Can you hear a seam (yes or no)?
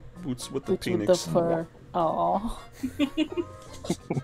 no